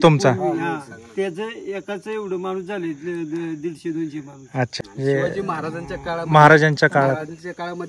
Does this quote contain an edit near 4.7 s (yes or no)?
yes